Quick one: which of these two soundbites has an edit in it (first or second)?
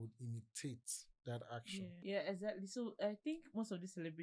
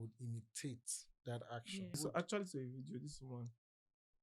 first